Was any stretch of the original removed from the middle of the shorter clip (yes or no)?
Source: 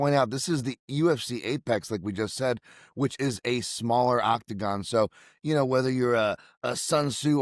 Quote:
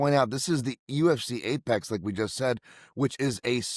no